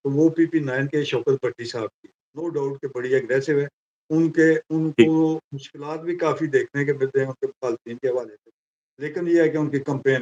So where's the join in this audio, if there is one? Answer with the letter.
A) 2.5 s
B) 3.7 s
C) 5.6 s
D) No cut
D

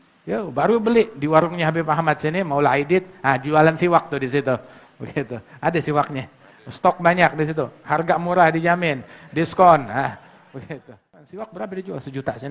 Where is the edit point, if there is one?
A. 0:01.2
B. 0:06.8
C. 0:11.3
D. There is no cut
C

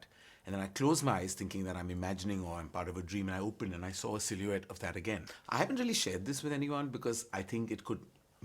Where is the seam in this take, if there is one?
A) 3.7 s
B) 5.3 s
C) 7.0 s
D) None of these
B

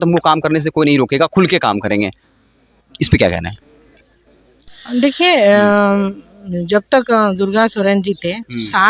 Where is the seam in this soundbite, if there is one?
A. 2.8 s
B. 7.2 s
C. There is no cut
C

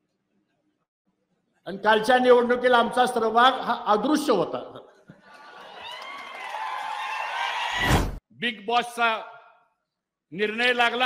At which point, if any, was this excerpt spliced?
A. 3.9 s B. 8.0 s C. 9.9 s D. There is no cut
B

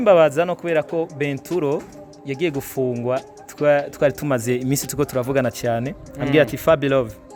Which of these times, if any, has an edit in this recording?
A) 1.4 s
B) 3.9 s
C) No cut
C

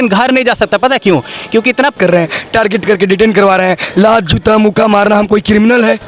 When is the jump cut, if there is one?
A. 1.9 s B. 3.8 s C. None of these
A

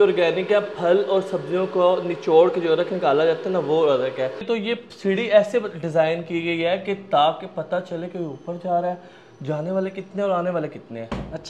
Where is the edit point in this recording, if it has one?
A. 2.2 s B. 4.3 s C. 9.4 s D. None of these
B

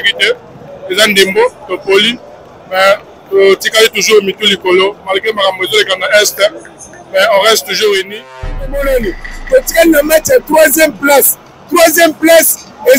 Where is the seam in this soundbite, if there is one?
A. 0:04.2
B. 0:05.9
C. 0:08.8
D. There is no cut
C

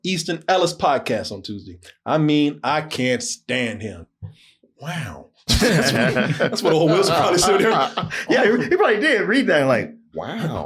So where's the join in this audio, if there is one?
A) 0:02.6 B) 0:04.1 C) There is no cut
B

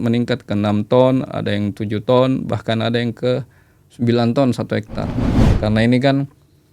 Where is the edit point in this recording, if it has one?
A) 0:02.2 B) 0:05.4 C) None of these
B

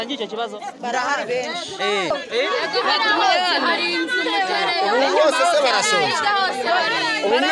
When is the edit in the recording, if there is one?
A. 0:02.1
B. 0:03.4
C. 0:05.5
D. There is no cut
A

